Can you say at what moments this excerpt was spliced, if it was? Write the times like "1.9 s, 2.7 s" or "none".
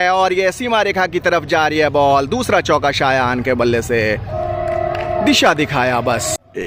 none